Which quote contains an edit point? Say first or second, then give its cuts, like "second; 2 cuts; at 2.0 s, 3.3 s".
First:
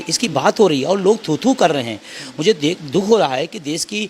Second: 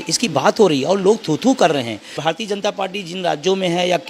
second; 1 cut; at 2.1 s